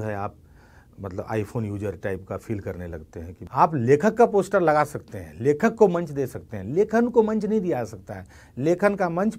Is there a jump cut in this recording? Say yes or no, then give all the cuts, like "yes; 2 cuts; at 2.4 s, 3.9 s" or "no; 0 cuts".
yes; 1 cut; at 3.4 s